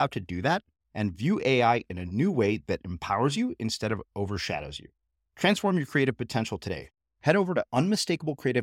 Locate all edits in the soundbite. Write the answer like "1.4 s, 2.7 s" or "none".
none